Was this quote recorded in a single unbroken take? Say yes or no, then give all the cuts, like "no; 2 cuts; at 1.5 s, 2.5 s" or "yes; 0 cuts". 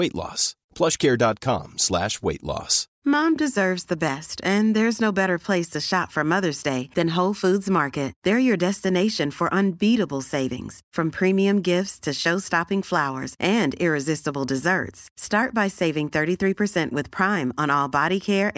no; 1 cut; at 2.8 s